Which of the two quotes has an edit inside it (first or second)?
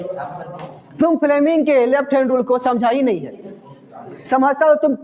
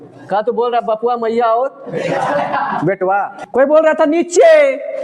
second